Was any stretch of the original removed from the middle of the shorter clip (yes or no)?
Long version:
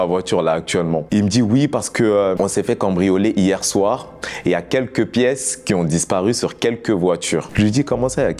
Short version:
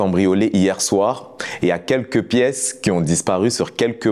no